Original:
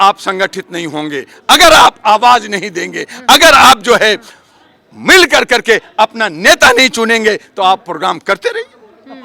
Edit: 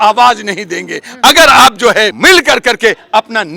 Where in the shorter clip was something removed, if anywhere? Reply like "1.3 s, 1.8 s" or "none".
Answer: 2.1 s